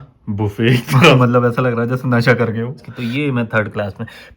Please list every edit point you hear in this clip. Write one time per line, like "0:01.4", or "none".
0:01.2
0:02.9